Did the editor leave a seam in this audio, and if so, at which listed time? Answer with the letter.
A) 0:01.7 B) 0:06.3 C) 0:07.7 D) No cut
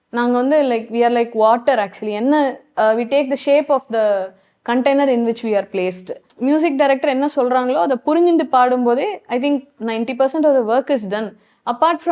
B